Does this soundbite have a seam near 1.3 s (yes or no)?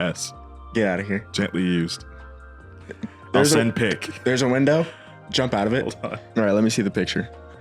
yes